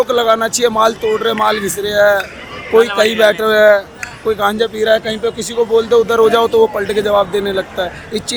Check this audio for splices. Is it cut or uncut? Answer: uncut